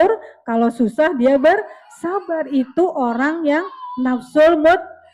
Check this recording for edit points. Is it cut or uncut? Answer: uncut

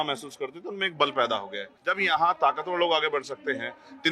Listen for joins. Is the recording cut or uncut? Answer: cut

